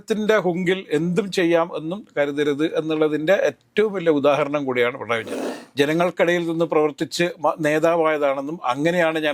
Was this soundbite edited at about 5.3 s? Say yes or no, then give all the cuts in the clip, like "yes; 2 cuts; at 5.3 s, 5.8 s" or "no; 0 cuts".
yes; 1 cut; at 5.3 s